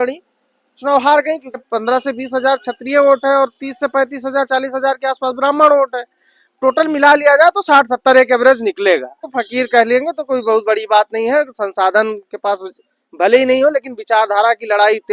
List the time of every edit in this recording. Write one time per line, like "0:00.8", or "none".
0:01.6
0:09.4